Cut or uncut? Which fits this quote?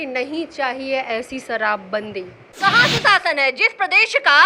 cut